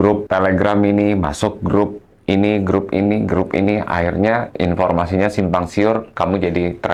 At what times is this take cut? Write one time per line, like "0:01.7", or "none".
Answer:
none

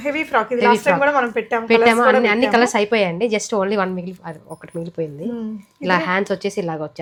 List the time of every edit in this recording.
none

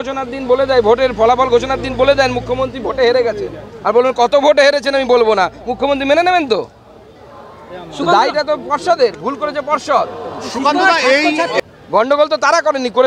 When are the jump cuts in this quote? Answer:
0:11.5

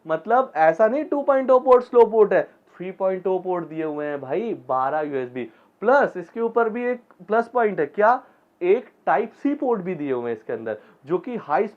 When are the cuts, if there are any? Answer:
none

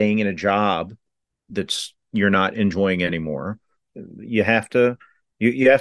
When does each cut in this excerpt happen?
0:03.8

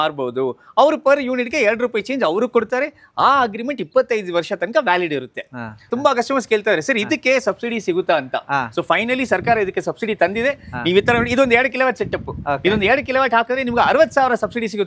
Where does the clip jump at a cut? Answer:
0:05.9

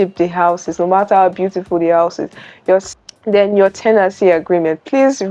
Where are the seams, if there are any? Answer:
0:02.9

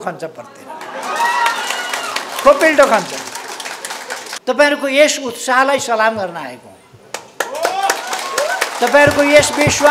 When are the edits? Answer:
0:04.2

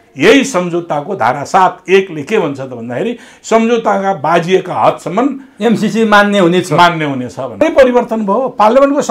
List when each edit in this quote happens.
0:07.6

